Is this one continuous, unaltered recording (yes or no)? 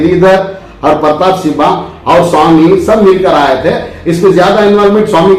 yes